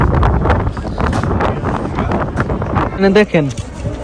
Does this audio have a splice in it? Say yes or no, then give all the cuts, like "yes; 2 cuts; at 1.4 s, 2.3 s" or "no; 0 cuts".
yes; 1 cut; at 2.9 s